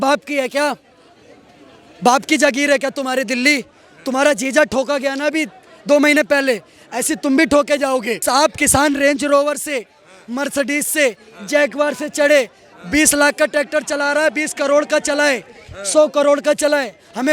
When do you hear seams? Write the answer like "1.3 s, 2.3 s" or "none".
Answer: 8.1 s